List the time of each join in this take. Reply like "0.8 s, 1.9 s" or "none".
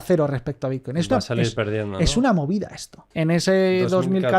3.0 s